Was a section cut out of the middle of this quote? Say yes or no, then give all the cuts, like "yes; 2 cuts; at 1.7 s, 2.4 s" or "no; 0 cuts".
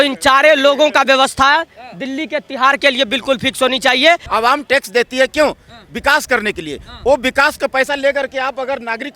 yes; 1 cut; at 4.2 s